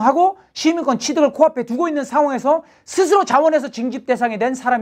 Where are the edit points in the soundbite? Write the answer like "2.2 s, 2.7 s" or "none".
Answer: none